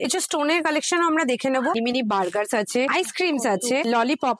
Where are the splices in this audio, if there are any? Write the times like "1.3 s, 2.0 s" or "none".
1.8 s